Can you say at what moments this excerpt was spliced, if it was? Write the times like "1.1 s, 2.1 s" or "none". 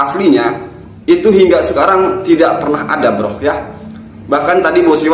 none